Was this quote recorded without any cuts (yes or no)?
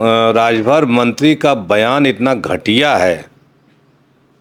yes